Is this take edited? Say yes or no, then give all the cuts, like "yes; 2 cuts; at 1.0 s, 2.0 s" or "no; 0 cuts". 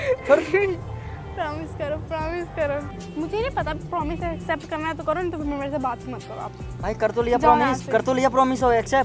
yes; 1 cut; at 3.1 s